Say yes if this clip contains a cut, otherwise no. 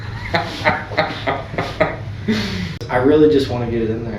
yes